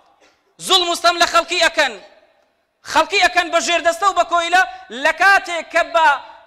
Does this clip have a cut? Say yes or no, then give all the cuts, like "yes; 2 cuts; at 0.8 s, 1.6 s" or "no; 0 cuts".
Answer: no; 0 cuts